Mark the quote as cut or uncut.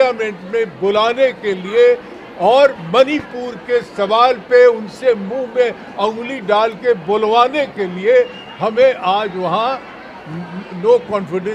uncut